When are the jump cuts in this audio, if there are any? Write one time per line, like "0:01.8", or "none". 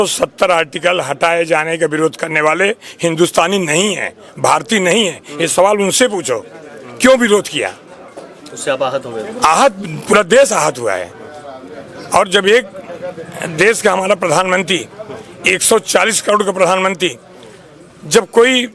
none